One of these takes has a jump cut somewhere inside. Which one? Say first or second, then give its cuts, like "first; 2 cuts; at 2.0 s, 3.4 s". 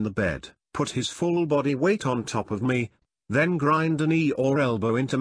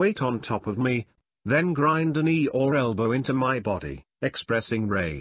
first; 1 cut; at 0.9 s